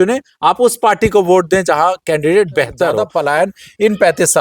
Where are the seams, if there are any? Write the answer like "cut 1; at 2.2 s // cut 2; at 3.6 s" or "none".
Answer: cut 1; at 3.0 s